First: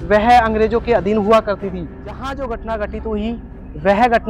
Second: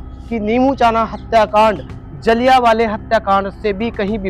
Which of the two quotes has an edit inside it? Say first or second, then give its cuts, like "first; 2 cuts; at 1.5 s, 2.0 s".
first; 1 cut; at 2.0 s